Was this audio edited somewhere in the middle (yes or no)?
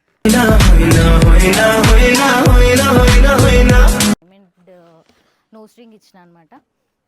yes